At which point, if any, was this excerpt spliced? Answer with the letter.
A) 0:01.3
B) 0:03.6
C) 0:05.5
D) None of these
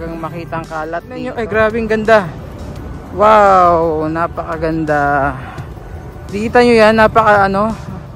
A